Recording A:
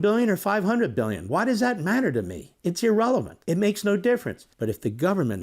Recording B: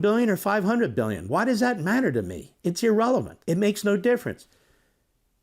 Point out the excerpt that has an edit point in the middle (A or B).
A